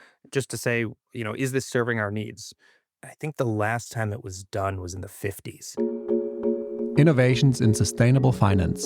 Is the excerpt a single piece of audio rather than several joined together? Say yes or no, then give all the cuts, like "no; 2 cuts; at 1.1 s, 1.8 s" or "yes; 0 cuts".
no; 1 cut; at 5.7 s